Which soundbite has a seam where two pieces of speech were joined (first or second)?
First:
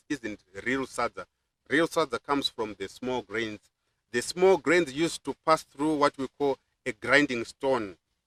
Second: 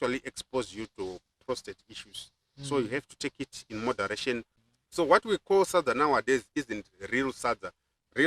second